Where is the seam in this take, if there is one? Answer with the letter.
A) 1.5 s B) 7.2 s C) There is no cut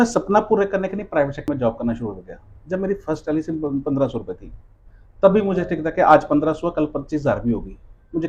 A